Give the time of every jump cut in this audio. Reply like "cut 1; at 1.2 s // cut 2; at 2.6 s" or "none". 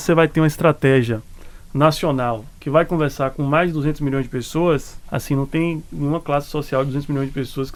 none